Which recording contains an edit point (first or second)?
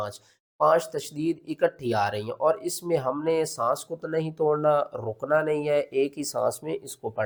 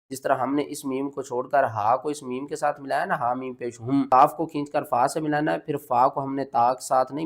second